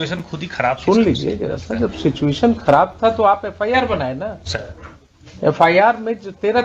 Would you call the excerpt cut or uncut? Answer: uncut